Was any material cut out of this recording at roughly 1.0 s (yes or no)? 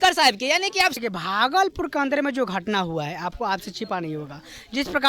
yes